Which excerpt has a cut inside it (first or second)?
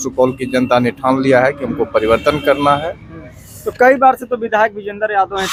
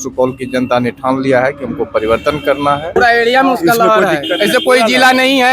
second